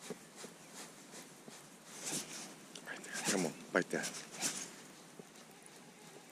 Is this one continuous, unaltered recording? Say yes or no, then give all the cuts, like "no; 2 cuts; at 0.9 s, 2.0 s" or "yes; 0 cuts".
yes; 0 cuts